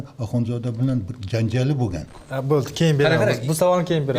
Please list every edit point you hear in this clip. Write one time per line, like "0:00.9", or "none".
0:02.2